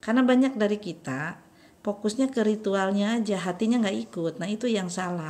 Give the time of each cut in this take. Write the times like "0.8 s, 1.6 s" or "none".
none